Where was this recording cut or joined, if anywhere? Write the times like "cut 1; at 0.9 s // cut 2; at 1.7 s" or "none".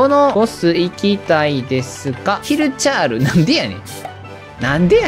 none